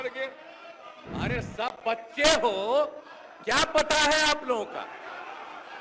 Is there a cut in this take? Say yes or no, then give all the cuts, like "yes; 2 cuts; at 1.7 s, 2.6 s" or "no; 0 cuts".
yes; 1 cut; at 0.9 s